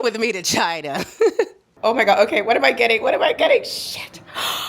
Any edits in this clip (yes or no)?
yes